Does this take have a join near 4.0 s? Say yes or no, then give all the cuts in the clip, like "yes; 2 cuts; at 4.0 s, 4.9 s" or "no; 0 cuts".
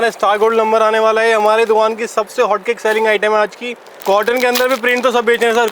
yes; 1 cut; at 4.0 s